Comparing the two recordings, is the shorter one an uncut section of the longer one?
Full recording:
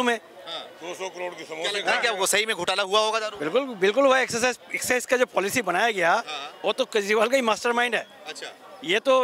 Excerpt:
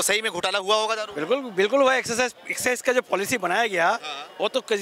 yes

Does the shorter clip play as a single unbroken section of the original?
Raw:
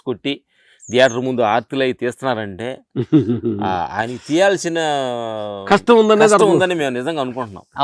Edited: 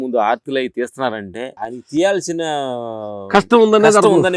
no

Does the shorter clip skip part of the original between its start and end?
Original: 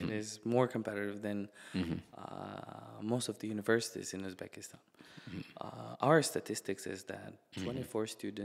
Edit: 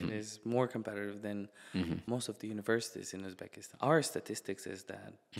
yes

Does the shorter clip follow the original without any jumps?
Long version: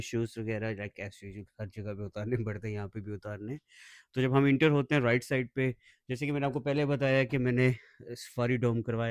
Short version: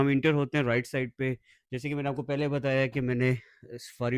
yes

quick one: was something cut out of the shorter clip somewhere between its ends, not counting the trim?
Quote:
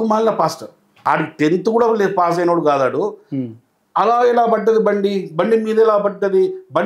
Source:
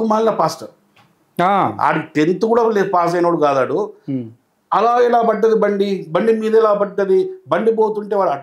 yes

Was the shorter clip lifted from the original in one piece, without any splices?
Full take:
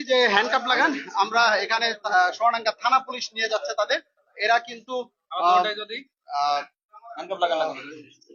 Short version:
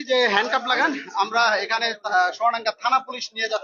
yes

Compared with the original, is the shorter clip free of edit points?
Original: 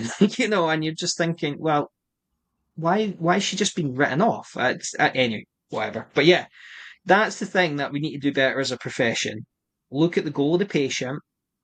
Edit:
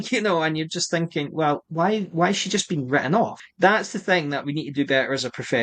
no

